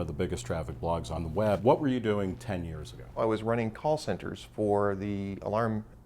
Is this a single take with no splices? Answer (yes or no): no